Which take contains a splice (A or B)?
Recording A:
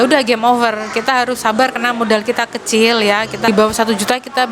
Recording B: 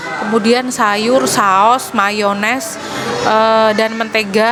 A